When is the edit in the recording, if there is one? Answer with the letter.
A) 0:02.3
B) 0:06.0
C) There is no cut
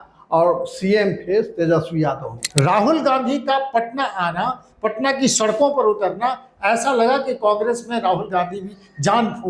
A